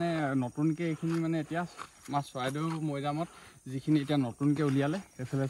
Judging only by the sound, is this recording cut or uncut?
uncut